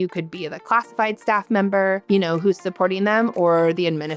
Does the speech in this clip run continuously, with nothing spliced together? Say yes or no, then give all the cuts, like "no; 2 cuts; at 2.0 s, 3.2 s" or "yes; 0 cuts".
yes; 0 cuts